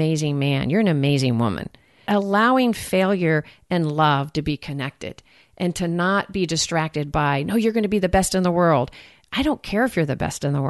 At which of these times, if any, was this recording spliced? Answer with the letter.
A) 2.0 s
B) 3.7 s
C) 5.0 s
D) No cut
A